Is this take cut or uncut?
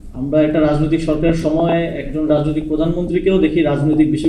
uncut